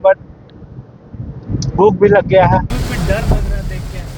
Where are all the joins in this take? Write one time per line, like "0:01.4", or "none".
0:02.7